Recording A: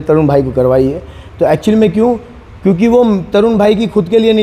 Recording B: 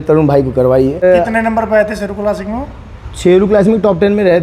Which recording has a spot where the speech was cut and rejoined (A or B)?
B